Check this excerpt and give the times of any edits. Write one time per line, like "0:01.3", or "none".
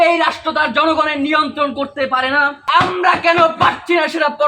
0:02.7